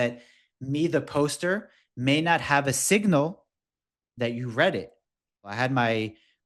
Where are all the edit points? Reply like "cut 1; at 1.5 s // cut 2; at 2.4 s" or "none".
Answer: cut 1; at 5.5 s